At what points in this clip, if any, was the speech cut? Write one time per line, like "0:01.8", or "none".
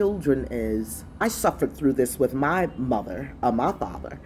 0:01.2